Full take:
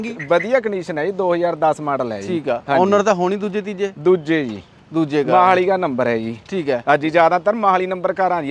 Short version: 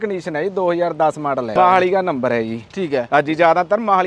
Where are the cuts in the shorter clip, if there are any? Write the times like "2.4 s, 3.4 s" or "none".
1.5 s